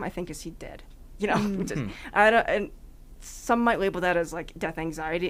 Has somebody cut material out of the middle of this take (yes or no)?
no